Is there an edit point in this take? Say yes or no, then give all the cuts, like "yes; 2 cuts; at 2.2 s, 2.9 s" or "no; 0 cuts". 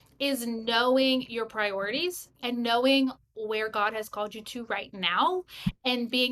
no; 0 cuts